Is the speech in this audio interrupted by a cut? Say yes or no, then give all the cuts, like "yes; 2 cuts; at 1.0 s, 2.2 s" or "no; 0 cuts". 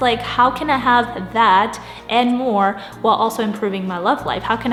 no; 0 cuts